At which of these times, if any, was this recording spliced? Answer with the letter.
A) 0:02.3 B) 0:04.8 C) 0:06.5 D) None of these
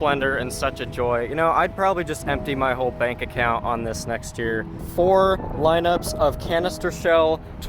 B